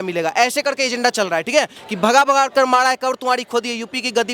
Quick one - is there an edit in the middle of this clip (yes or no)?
yes